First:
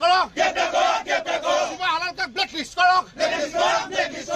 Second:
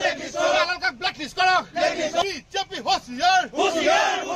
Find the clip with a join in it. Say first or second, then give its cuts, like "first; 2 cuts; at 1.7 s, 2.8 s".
second; 1 cut; at 2.2 s